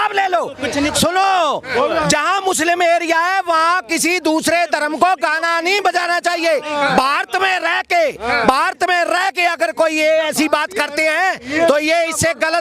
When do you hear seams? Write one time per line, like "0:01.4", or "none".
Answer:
none